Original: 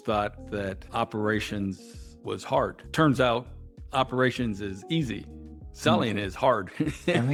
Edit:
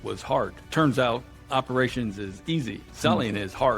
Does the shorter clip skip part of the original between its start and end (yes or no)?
yes